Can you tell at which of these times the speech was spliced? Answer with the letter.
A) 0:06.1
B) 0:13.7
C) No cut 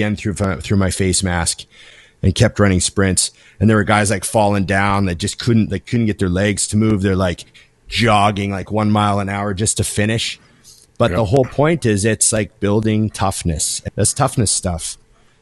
B